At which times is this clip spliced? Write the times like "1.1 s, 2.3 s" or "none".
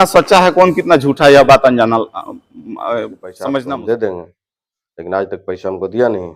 3.7 s